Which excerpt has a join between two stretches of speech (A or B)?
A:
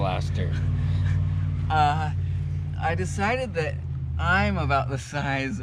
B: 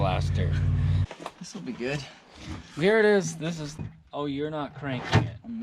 B